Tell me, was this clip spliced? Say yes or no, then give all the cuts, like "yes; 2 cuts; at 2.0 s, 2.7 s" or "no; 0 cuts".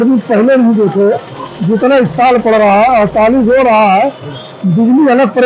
no; 0 cuts